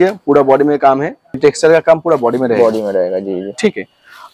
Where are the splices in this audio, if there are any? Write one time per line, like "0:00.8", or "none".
0:01.4